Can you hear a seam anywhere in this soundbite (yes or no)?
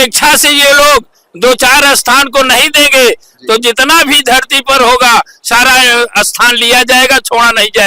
no